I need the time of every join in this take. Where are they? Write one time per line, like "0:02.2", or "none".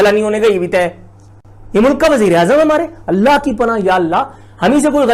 none